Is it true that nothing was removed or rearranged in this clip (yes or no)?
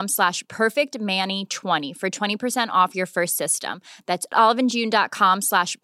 yes